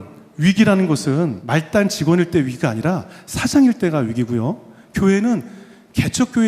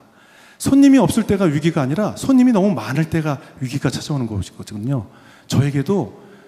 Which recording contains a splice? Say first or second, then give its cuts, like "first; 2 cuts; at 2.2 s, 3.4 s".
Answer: first; 1 cut; at 1.4 s